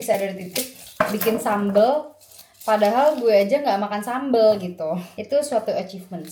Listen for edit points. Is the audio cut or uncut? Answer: uncut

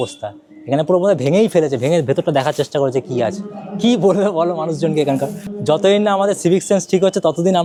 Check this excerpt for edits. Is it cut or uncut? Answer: uncut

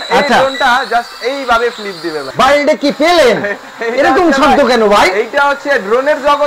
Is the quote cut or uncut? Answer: cut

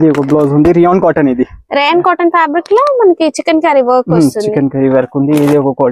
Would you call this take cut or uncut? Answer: uncut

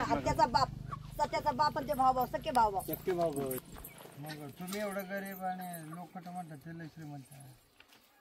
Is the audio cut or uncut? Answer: cut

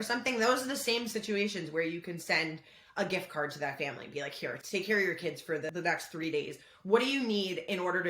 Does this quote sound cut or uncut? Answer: cut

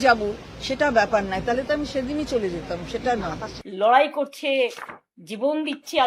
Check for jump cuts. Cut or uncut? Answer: uncut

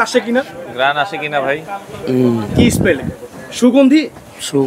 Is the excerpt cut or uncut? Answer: uncut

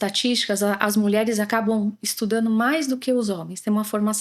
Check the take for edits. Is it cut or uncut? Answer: uncut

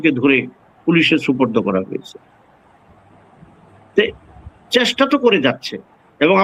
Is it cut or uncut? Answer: uncut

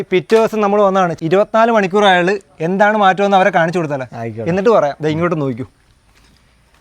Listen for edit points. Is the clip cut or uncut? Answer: cut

